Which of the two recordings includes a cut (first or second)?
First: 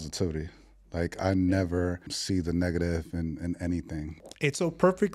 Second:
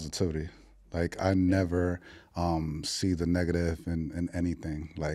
first